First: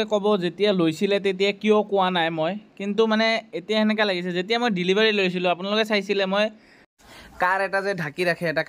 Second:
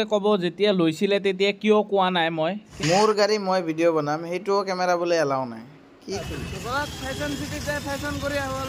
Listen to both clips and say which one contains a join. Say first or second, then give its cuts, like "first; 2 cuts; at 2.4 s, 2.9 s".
second; 2 cuts; at 2.7 s, 6.2 s